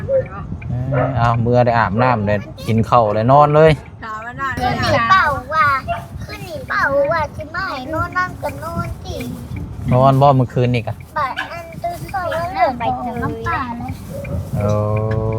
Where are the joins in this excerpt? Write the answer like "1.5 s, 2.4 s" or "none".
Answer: 4.6 s